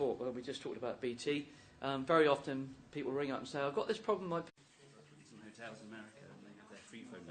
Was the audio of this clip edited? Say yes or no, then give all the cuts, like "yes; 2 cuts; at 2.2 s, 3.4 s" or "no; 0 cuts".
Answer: no; 0 cuts